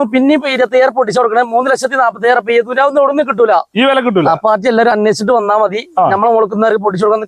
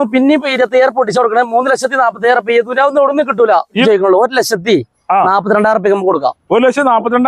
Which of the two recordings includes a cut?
second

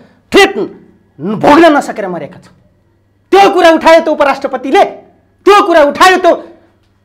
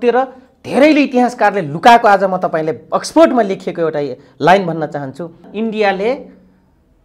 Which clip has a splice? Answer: second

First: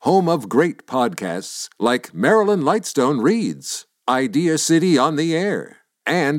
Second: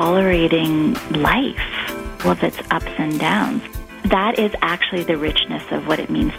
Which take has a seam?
second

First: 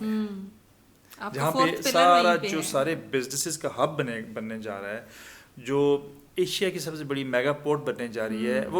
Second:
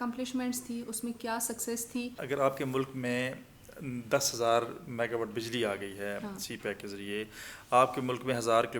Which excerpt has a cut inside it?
second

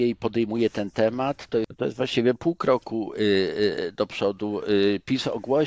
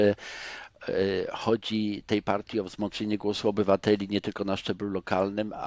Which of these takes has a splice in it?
first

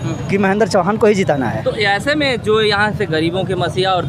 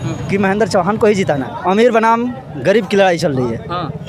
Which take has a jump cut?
second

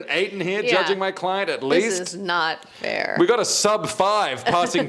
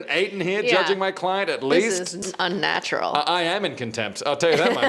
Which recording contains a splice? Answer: second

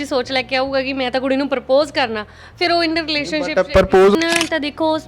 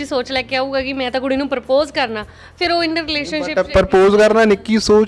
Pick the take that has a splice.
first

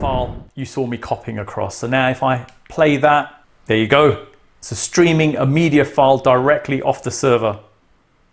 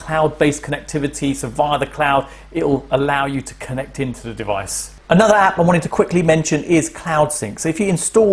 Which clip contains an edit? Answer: second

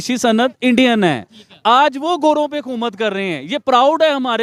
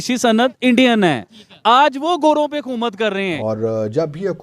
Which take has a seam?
second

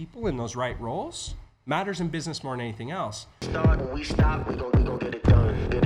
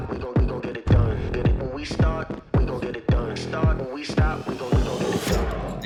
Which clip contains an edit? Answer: first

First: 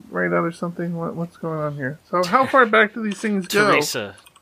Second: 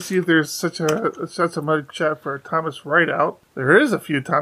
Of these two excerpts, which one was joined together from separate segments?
second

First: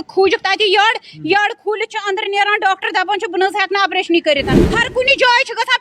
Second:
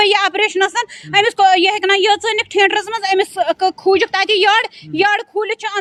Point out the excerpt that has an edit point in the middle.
first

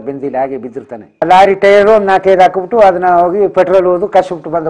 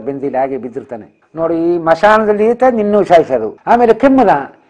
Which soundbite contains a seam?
second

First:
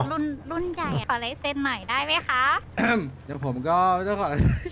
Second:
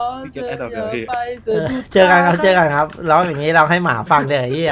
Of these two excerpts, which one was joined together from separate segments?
first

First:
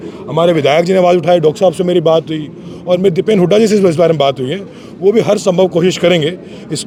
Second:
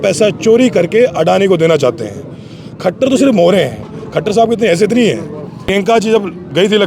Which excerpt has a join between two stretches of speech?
second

